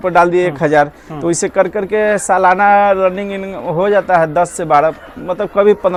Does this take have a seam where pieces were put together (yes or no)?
no